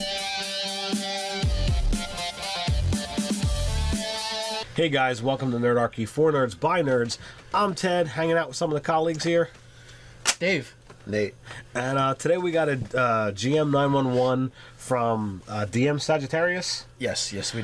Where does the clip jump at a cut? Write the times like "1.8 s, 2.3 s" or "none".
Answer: none